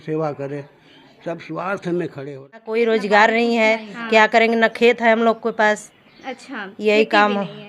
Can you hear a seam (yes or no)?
yes